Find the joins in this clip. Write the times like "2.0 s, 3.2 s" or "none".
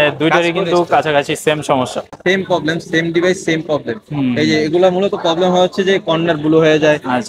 2.1 s